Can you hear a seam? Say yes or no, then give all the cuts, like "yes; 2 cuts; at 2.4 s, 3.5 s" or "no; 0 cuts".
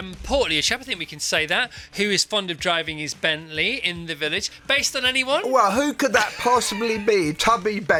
no; 0 cuts